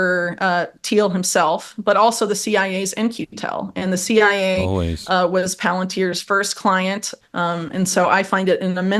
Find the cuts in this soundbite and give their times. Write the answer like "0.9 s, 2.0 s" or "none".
7.1 s